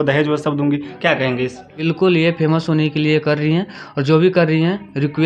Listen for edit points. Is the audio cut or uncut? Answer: cut